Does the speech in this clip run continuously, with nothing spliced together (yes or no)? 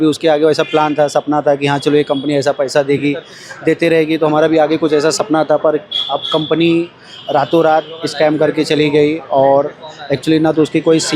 yes